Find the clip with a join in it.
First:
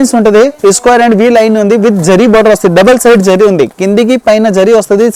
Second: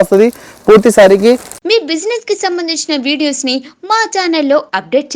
second; 1 cut; at 1.5 s

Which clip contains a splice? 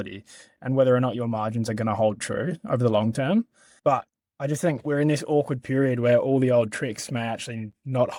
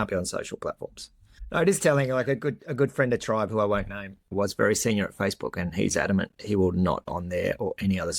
second; 1 cut; at 1.4 s

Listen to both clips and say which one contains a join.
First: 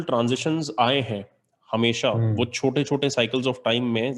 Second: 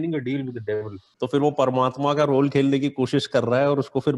second; 1 cut; at 1.0 s

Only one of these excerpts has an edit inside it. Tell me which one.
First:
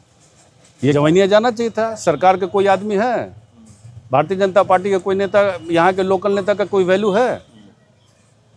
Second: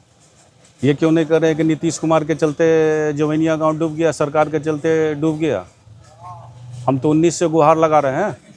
first; 1 cut; at 0.9 s

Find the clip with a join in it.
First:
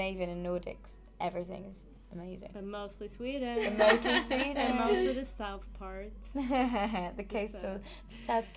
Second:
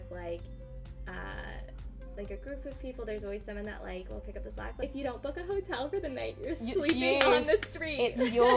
second; 1 cut; at 4.8 s

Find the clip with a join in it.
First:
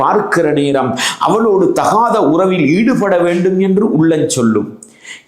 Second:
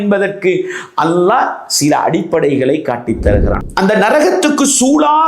second; 1 cut; at 3.6 s

